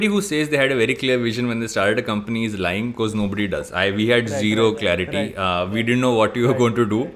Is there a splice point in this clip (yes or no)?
no